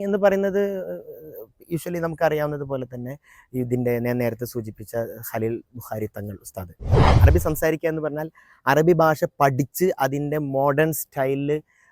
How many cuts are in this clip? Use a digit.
1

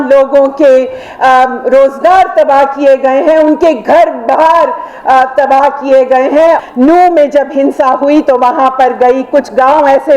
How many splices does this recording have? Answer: 1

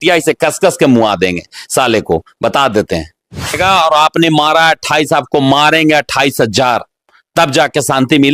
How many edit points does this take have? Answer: 1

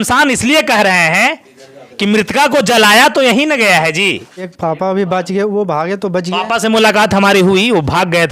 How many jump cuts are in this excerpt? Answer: 1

